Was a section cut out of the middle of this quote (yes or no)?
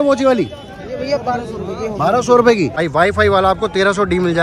yes